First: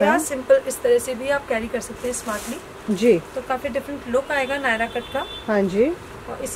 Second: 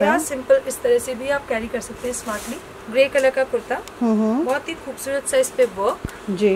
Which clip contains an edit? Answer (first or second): second